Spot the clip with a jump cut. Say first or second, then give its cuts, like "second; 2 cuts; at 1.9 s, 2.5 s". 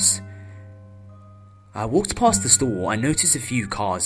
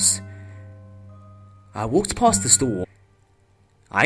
first; 1 cut; at 2.8 s